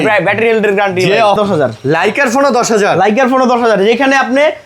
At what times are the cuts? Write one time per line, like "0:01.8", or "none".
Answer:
0:01.4